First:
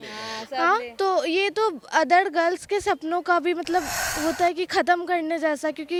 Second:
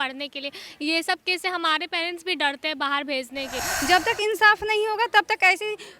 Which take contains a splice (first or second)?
second